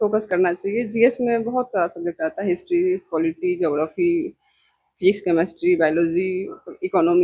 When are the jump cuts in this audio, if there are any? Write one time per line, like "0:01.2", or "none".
none